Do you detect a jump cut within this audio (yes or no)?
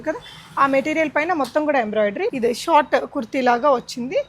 yes